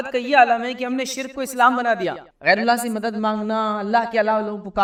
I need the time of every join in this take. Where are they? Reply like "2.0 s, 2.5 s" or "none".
none